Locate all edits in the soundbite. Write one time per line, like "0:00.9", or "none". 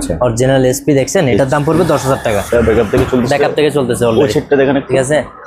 0:02.5